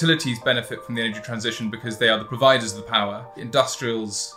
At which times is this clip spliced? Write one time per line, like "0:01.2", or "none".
0:03.4

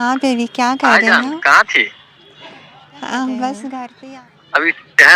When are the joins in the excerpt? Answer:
0:03.9

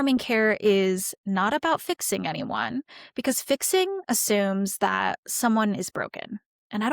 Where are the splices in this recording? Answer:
0:01.2

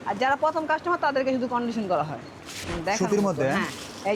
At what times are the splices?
0:02.7

